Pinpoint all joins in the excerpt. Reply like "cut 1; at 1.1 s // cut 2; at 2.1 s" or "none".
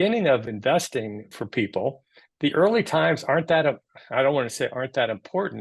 cut 1; at 1.0 s